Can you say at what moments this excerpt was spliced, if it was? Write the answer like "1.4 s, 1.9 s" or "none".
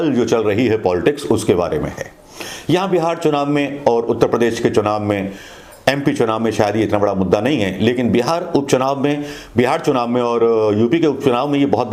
none

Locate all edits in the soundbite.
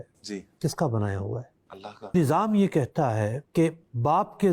2.1 s

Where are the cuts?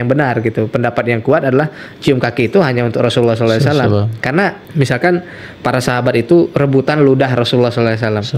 4.6 s

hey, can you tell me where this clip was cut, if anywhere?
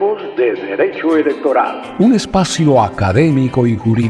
1.9 s

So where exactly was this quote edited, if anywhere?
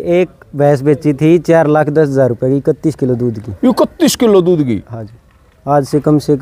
none

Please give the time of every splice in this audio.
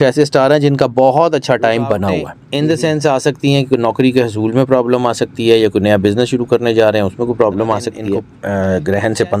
2.4 s, 8.3 s

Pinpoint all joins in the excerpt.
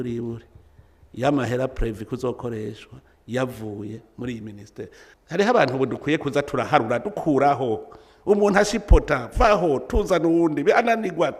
5.0 s

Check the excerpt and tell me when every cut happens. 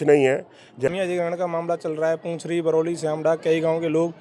0.9 s

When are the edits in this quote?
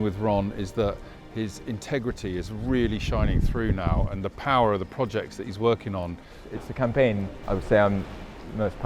6.3 s, 7.3 s

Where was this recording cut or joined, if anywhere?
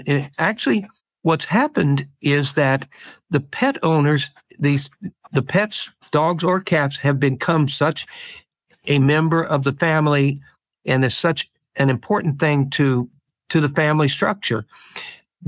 1.0 s

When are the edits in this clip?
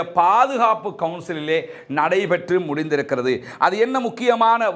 none

